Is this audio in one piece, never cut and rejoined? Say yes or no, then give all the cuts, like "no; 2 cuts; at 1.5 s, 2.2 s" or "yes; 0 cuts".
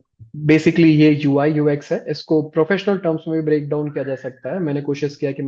yes; 0 cuts